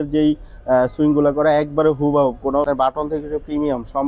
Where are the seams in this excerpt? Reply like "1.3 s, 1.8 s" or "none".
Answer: 2.6 s